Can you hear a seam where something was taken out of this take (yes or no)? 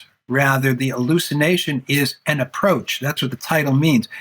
yes